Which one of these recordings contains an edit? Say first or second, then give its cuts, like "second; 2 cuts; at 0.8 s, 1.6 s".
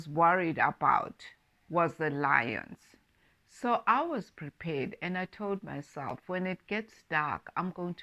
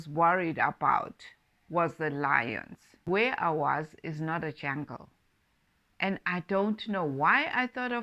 first; 1 cut; at 3.1 s